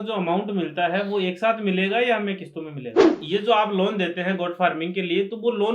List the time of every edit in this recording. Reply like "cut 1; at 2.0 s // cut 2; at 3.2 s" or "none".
cut 1; at 3.1 s